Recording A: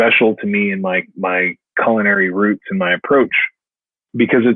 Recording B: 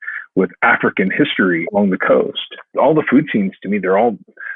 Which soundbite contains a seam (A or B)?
B